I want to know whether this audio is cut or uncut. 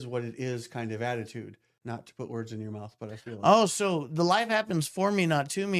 cut